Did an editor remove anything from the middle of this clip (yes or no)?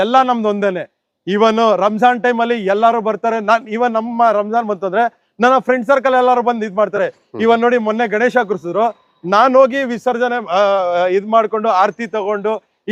no